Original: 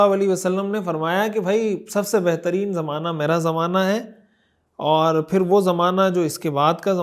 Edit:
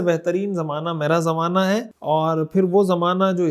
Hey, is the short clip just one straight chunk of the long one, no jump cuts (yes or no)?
no